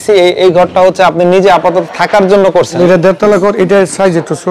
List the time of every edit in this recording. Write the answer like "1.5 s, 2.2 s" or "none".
2.8 s